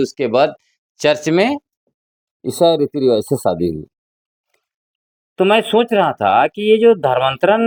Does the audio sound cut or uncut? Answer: uncut